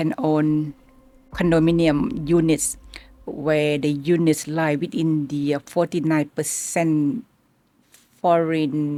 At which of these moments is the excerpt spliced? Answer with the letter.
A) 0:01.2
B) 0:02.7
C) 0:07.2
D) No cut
D